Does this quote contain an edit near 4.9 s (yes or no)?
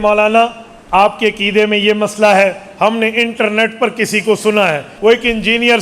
yes